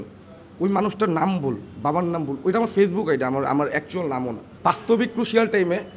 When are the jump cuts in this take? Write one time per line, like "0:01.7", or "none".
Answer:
0:04.4